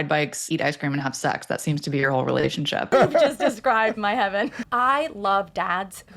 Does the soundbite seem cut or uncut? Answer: cut